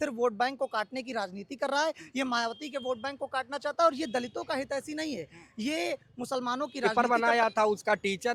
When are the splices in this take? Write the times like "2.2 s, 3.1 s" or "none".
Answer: 6.9 s